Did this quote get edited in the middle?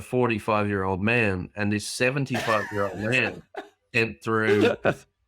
no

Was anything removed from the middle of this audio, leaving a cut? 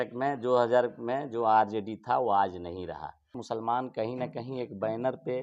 yes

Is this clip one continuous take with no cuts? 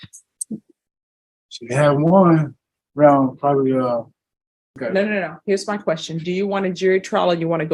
no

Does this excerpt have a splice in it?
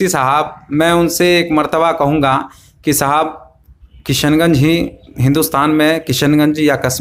no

